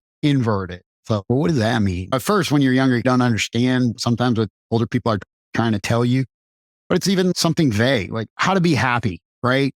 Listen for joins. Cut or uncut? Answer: uncut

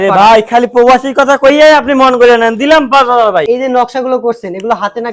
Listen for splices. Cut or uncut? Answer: cut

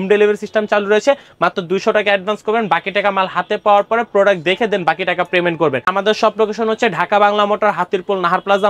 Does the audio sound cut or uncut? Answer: cut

